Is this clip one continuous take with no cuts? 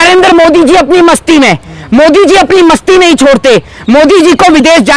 yes; 0 cuts

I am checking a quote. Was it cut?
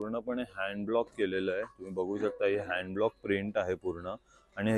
no; 0 cuts

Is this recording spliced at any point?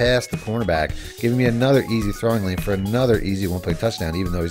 no; 0 cuts

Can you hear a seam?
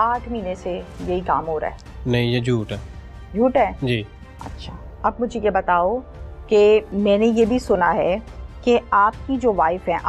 no; 0 cuts

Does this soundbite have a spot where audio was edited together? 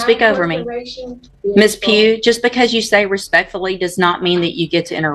yes; 1 cut; at 1.2 s

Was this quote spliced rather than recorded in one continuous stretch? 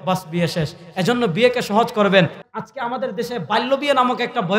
yes; 1 cut; at 2.4 s

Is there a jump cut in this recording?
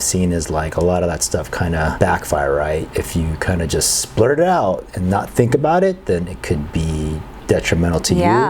yes; 2 cuts; at 1.9 s, 2.9 s

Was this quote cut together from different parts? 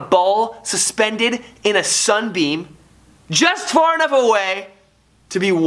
no; 0 cuts

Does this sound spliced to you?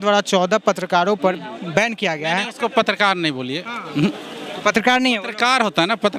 no; 0 cuts

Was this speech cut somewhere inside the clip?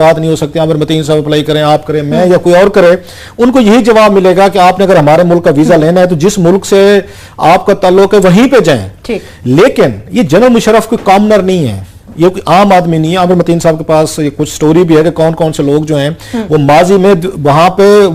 no; 0 cuts

